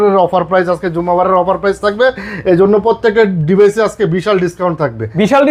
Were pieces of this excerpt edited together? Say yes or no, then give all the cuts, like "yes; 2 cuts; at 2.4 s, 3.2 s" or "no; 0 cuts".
no; 0 cuts